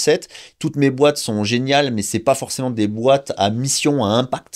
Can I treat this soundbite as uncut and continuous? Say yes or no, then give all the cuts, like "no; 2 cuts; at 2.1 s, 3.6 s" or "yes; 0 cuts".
yes; 0 cuts